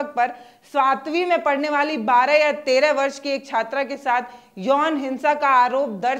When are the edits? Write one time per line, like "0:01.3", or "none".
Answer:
none